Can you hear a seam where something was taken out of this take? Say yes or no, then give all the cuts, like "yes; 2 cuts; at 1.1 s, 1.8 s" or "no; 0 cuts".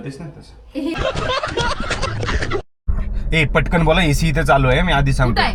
yes; 1 cut; at 2.8 s